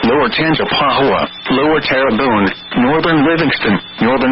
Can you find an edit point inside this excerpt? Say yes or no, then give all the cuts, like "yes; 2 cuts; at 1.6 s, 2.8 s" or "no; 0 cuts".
no; 0 cuts